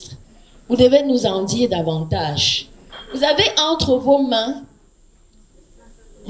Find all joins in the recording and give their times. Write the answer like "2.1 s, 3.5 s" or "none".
none